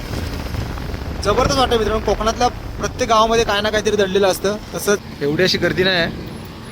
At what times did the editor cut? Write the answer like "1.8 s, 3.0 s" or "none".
5.0 s

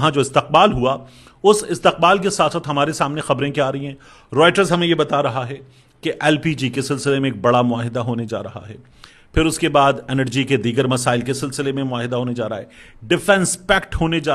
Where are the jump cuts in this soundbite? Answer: none

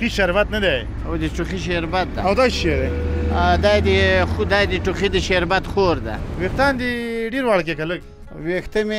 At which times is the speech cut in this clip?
6.2 s

